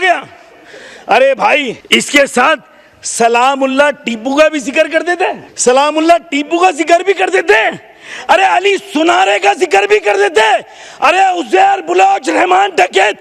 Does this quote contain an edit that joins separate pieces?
yes; 2 cuts; at 1.8 s, 5.5 s

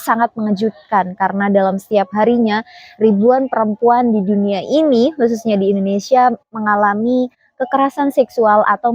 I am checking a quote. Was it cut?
no; 0 cuts

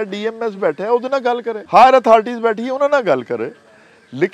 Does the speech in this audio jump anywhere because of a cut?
yes; 1 cut; at 1.6 s

